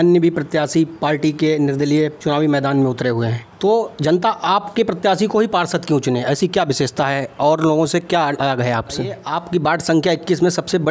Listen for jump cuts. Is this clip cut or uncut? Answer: cut